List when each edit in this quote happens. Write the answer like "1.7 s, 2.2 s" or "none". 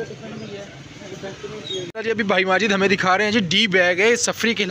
1.9 s